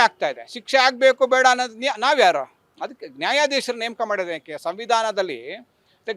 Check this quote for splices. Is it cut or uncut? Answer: uncut